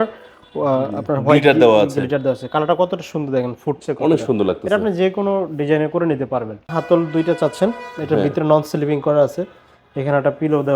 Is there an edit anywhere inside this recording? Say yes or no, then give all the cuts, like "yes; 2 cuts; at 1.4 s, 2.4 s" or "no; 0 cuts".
yes; 1 cut; at 6.6 s